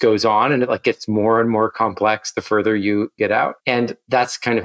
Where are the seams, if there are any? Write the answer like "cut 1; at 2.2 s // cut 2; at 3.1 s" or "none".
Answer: cut 1; at 3.4 s